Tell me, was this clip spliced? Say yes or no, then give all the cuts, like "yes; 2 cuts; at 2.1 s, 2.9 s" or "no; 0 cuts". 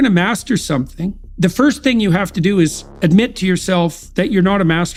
no; 0 cuts